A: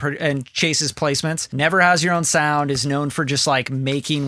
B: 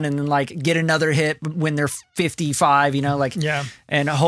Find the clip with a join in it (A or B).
A